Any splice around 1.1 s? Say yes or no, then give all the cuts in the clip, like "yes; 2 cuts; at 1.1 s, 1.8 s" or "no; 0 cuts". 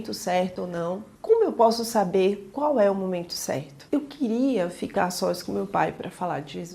yes; 2 cuts; at 1.1 s, 3.8 s